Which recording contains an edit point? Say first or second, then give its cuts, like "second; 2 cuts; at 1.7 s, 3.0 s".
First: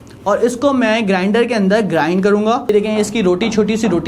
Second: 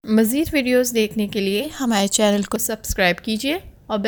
first; 1 cut; at 2.7 s